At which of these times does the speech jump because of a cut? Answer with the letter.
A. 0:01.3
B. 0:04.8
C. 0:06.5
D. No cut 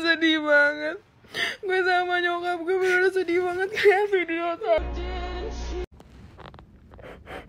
B